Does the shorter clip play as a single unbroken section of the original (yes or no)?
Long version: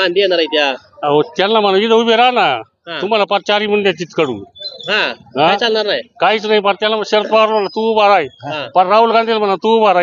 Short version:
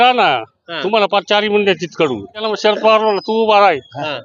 no